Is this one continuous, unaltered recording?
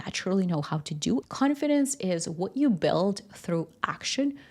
no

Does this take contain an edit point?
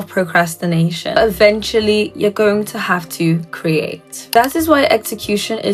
yes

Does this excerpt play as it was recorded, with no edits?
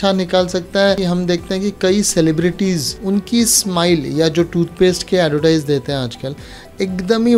no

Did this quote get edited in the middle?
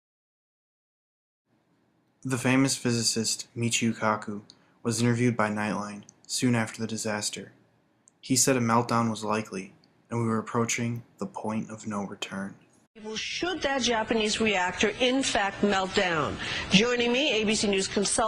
yes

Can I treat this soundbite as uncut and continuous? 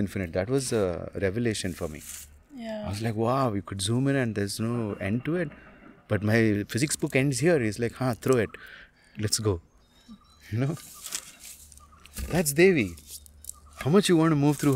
yes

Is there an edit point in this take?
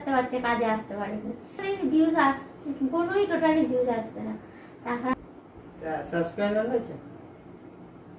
yes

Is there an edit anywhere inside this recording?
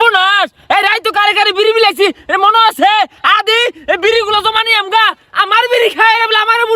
no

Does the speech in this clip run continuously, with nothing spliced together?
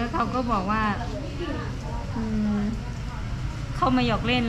yes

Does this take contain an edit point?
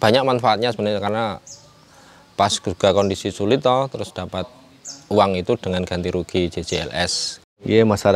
no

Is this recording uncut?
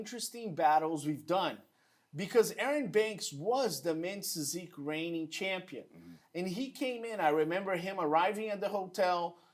yes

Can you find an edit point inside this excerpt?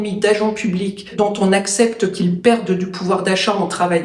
yes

